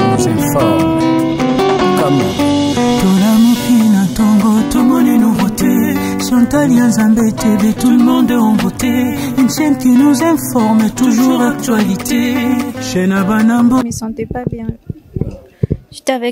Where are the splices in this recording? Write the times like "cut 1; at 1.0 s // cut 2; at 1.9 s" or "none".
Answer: cut 1; at 13.8 s